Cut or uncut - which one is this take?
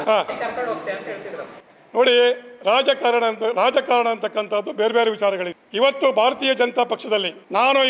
uncut